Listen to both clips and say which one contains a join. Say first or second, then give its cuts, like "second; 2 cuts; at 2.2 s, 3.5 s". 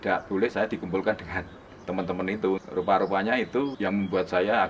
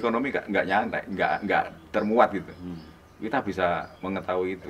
first; 2 cuts; at 2.6 s, 3.8 s